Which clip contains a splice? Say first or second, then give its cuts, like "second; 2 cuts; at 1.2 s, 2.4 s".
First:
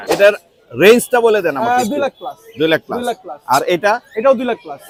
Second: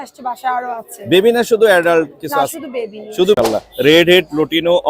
second; 1 cut; at 3.4 s